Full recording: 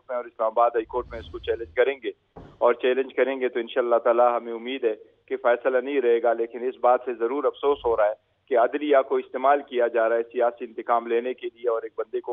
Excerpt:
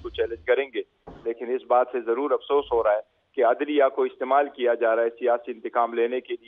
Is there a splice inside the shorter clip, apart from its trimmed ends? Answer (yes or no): yes